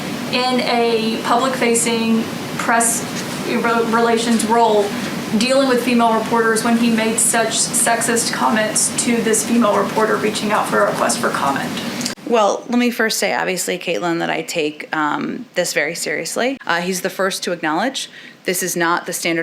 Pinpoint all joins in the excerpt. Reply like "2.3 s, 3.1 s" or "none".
16.6 s